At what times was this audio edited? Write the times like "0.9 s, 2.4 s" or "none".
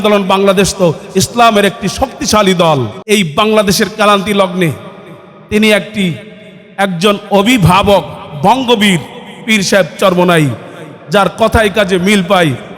2.9 s

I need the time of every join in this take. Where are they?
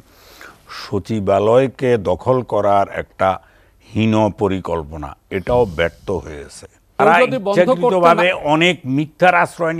7.0 s

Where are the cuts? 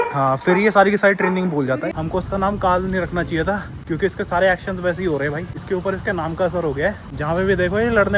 1.9 s, 3.7 s, 5.5 s, 7.1 s

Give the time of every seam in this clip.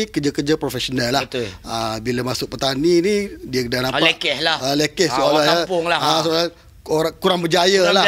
none

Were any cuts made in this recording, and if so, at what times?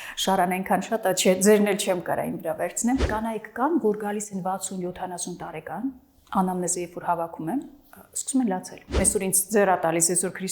3.1 s, 8.8 s

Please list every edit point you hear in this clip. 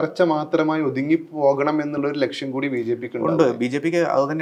none

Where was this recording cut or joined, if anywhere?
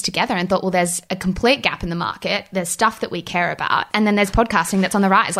1.0 s, 3.9 s

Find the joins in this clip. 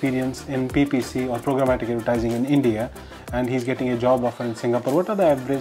none

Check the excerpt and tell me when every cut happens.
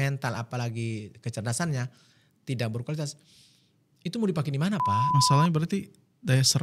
5.1 s

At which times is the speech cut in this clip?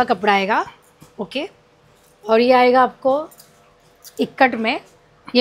none

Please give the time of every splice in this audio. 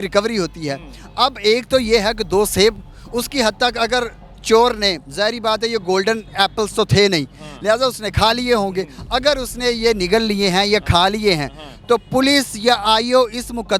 none

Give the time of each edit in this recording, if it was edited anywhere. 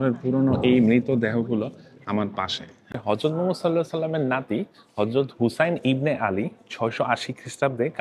3.0 s

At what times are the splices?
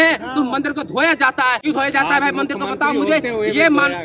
1.6 s

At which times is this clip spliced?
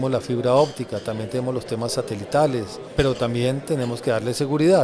2.8 s

